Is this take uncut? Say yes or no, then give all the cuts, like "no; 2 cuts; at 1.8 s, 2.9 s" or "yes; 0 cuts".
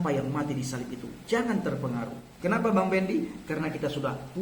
yes; 0 cuts